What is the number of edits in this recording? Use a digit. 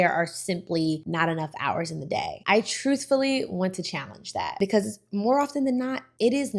2